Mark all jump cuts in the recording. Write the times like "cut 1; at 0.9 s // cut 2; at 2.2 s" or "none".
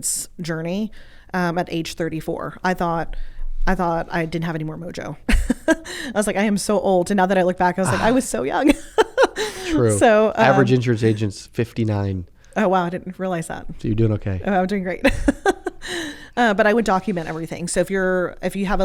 none